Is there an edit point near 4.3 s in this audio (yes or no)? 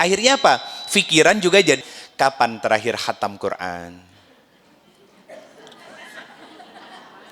no